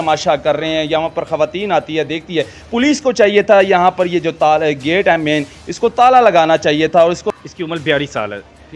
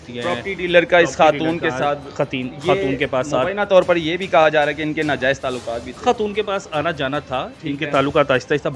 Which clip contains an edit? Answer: first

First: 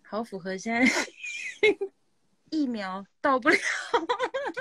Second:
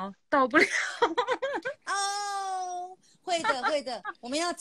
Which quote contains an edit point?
first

